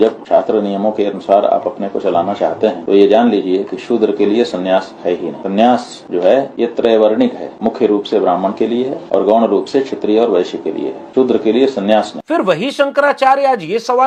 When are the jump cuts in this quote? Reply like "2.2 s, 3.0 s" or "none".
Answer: none